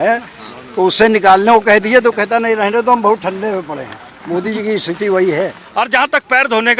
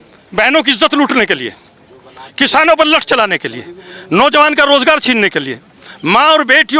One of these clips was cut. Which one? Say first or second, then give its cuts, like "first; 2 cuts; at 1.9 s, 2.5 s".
first; 1 cut; at 5.6 s